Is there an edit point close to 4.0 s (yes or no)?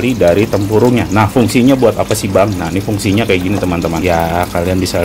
yes